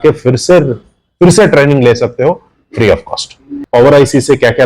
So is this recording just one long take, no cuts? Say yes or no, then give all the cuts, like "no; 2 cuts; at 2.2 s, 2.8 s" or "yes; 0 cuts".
no; 1 cut; at 3.5 s